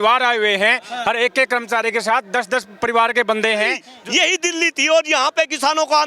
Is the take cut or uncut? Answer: cut